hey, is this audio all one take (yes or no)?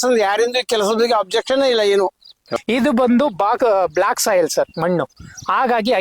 no